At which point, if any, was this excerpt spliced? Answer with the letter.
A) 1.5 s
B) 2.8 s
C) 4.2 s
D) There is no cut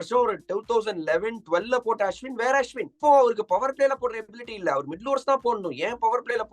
B